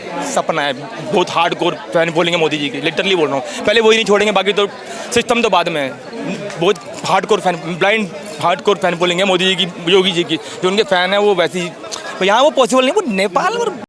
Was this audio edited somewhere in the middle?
no; 0 cuts

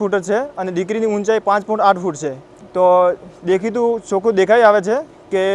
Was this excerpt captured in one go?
no; 1 cut; at 2.5 s

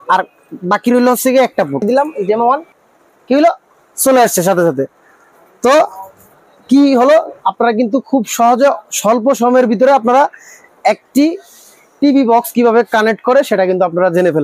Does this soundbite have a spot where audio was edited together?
yes; 1 cut; at 1.9 s

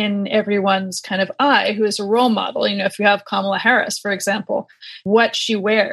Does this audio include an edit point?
yes; 1 cut; at 5.0 s

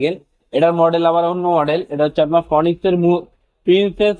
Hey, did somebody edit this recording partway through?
no; 0 cuts

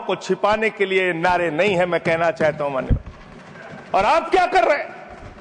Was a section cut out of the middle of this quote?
no; 0 cuts

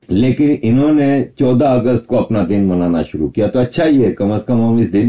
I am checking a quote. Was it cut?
no; 0 cuts

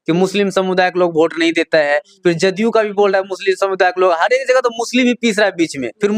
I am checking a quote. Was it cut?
no; 0 cuts

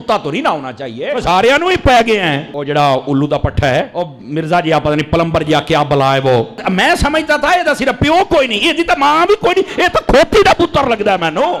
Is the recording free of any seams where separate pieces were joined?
yes; 0 cuts

